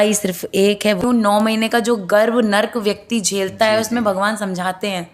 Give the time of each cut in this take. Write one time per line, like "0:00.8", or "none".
0:01.0